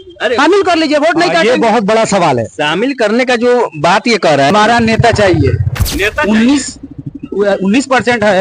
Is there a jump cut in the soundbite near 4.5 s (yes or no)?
yes